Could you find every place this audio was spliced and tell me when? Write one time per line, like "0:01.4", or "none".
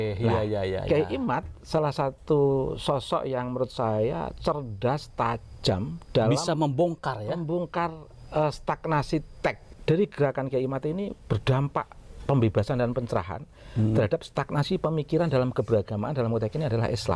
0:09.7